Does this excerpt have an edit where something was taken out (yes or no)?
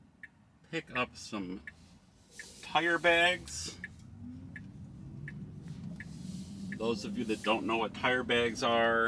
no